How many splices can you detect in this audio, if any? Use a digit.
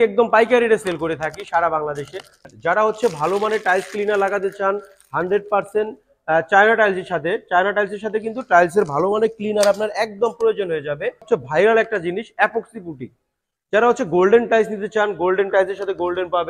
2